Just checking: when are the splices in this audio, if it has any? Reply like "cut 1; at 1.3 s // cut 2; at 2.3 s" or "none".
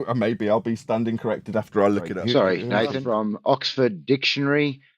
cut 1; at 2.1 s // cut 2; at 3.0 s